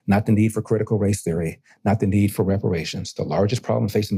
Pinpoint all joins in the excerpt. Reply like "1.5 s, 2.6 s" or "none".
none